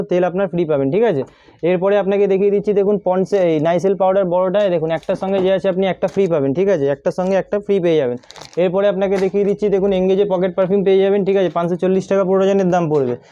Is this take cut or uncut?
uncut